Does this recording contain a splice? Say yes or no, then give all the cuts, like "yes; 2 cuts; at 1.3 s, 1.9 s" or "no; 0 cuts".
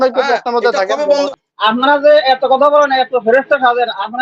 yes; 1 cut; at 1.3 s